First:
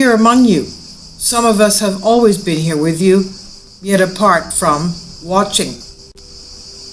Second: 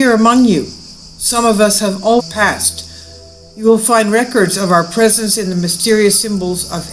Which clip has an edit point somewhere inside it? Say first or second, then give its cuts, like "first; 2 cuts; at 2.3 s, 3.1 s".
first; 1 cut; at 2.2 s